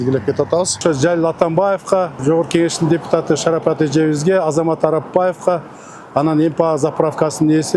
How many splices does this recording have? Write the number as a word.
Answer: two